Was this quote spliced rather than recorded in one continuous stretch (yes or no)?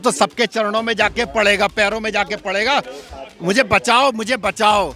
no